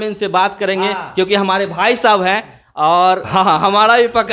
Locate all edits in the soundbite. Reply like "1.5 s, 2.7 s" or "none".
3.2 s